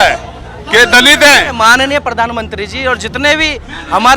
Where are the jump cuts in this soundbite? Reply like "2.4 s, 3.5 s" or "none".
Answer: 1.5 s